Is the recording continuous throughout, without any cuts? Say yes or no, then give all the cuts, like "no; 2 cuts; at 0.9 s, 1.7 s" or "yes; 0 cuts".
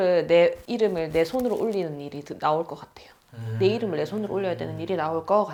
yes; 0 cuts